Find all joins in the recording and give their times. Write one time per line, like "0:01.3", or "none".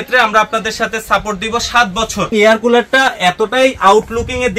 0:02.3